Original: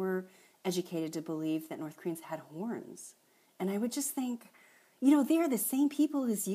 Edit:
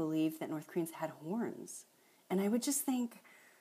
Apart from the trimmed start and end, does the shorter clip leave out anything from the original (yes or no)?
no